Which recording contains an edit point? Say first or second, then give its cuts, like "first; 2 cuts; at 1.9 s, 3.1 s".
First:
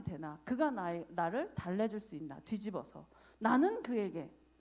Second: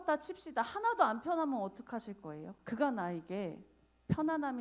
second; 1 cut; at 2.5 s